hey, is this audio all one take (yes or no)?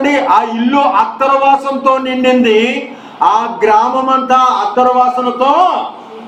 yes